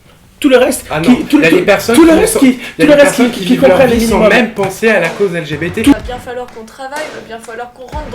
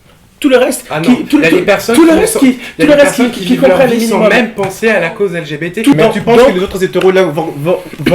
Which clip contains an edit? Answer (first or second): first